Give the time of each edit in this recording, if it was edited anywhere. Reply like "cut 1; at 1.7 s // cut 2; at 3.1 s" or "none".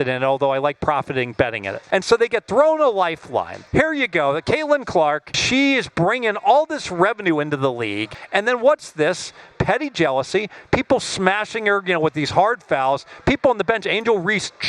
cut 1; at 1.7 s // cut 2; at 3.6 s // cut 3; at 5.3 s // cut 4; at 8.1 s